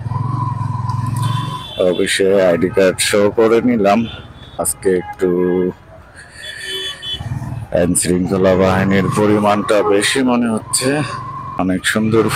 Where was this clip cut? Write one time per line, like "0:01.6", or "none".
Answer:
0:04.7
0:11.5